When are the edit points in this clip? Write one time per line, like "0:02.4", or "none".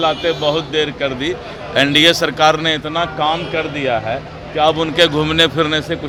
none